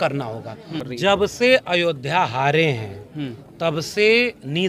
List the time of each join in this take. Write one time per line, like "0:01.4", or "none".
0:00.9